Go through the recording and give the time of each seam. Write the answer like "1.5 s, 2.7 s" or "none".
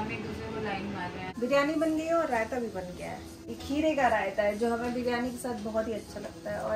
1.2 s, 3.5 s